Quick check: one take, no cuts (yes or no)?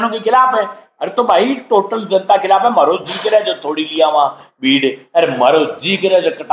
yes